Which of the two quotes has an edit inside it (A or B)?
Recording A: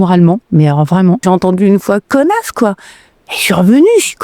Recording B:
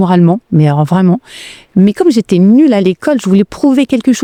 A